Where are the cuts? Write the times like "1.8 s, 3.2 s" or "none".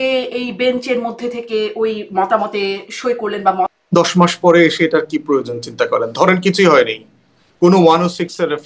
3.7 s